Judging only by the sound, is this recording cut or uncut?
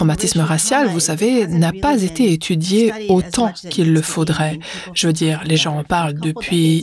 uncut